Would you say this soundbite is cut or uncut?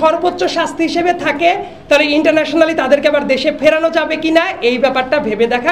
uncut